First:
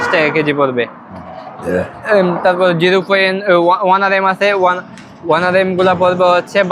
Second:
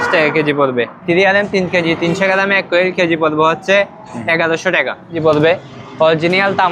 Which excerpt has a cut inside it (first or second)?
second